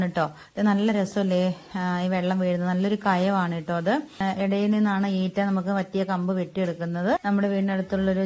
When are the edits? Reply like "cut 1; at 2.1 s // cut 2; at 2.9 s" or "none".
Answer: cut 1; at 4.2 s // cut 2; at 7.2 s